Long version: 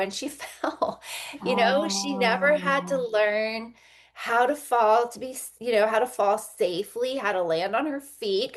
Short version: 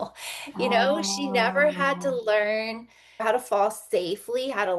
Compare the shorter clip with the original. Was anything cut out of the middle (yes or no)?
yes